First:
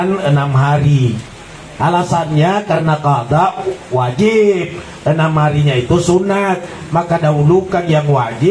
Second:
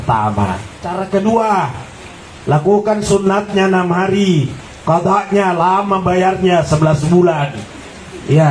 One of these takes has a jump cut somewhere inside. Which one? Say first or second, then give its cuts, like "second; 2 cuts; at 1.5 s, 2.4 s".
second; 1 cut; at 0.9 s